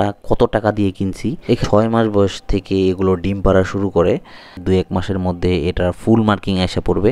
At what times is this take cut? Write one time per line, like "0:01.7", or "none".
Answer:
0:01.6
0:04.6